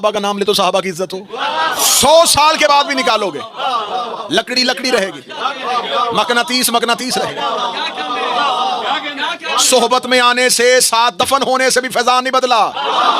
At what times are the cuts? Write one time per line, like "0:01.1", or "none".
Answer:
0:01.9